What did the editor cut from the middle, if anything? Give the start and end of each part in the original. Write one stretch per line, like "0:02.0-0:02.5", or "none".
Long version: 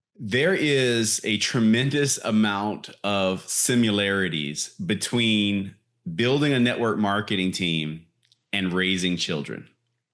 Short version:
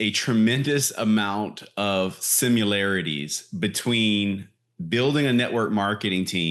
none